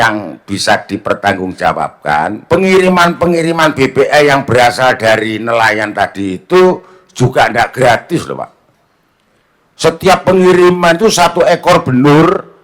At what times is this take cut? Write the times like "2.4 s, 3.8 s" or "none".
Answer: 2.4 s